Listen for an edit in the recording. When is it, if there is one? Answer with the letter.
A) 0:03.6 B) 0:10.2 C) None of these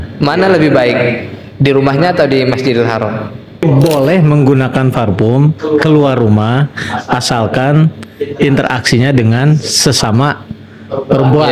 A